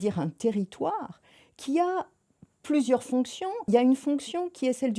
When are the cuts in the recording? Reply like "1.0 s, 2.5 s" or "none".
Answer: 3.7 s